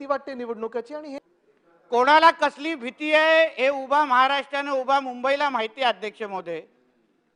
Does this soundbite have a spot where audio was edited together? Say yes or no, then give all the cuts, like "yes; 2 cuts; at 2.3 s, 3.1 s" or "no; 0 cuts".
yes; 1 cut; at 1.2 s